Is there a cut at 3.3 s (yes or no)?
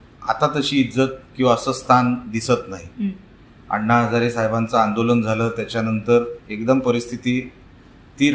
no